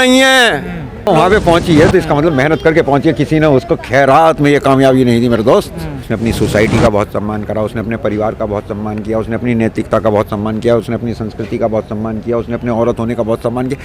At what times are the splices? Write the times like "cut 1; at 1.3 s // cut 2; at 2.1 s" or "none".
cut 1; at 1.1 s // cut 2; at 6.1 s